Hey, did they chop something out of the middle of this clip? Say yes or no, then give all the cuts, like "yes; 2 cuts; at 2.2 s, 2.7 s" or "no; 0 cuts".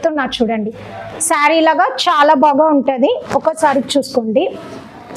yes; 1 cut; at 1.1 s